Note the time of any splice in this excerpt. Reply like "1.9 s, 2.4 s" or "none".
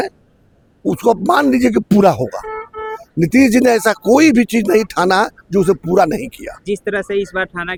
none

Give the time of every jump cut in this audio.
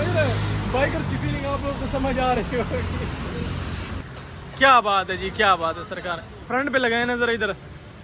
4.0 s

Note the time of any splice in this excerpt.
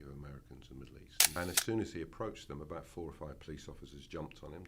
1.4 s

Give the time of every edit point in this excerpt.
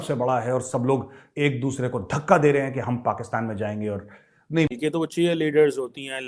4.7 s

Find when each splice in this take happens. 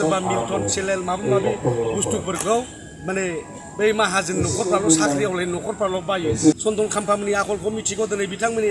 6.6 s

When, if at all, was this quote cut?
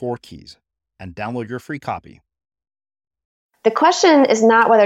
3.4 s

